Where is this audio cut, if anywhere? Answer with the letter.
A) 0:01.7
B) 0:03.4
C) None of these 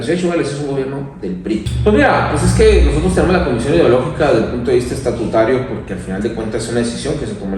A